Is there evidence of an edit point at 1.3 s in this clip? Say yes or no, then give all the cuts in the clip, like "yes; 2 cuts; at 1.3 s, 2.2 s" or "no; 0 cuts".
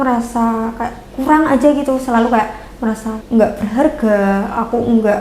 no; 1 cut; at 3.1 s